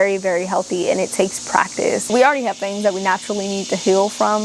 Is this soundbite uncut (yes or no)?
no